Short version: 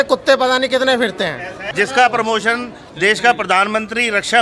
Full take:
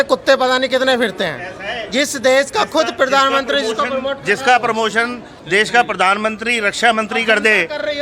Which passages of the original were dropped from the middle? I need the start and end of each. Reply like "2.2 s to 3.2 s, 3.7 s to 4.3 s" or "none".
1.7 s to 4.2 s